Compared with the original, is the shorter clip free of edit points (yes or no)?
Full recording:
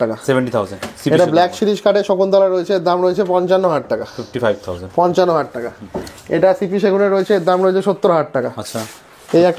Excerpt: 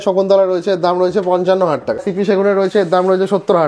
no